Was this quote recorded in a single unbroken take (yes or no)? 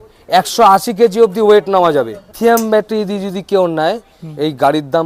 no